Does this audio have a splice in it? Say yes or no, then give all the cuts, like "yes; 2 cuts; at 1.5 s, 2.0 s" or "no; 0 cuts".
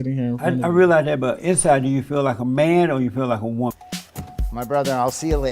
yes; 1 cut; at 3.7 s